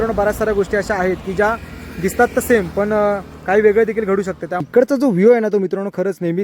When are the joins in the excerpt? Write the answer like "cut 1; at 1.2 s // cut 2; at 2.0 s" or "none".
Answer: cut 1; at 4.7 s